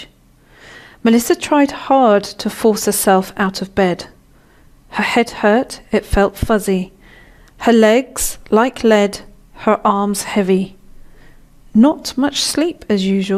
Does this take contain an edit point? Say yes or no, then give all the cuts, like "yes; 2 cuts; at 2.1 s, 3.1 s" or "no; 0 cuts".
no; 0 cuts